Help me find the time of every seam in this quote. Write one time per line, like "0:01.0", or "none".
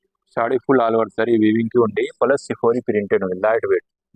none